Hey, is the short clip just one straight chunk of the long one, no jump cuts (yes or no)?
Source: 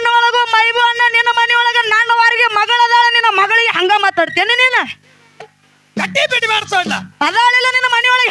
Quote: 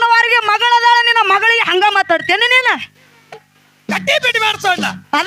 yes